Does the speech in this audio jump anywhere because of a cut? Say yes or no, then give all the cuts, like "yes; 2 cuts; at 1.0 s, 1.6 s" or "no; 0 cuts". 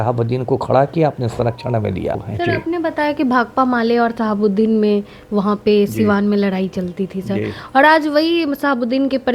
yes; 1 cut; at 2.3 s